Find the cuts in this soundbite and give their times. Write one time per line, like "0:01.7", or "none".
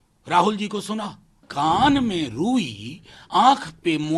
0:01.5